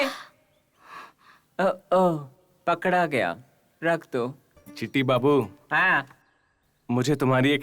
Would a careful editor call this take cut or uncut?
cut